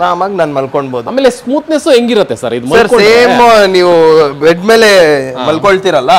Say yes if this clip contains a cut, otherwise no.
no